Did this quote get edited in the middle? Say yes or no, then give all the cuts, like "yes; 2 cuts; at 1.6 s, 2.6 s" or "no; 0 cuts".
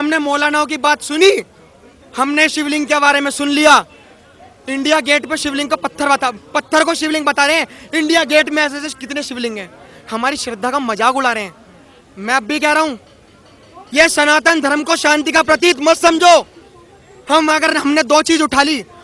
no; 0 cuts